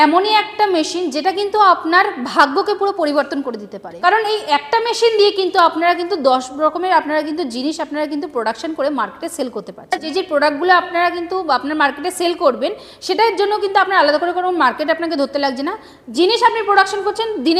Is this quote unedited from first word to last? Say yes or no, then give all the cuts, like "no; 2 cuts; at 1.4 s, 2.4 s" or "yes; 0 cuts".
no; 2 cuts; at 3.8 s, 10.0 s